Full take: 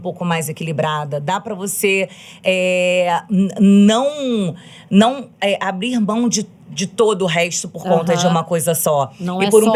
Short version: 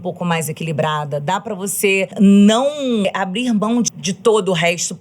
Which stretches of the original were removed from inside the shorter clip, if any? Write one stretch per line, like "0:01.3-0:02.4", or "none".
0:02.1-0:03.5
0:04.4-0:05.5
0:06.4-0:06.7